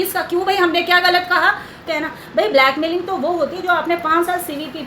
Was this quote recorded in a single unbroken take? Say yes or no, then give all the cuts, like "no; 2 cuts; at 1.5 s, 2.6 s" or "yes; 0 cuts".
no; 1 cut; at 1.9 s